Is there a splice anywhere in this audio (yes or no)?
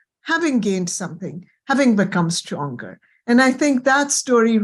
no